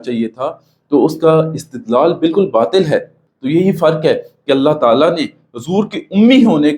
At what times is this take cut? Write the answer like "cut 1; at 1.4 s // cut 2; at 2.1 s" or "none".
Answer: cut 1; at 3.1 s